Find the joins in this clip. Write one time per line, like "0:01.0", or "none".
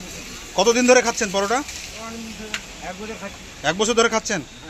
none